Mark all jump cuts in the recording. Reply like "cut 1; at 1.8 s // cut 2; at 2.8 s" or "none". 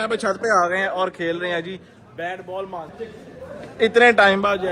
cut 1; at 3.0 s

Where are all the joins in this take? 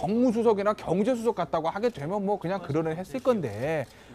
cut 1; at 1.8 s

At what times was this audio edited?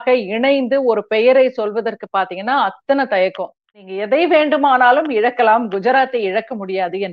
cut 1; at 3.8 s

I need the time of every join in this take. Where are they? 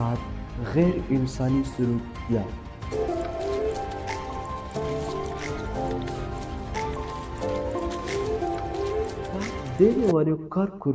cut 1; at 9.6 s

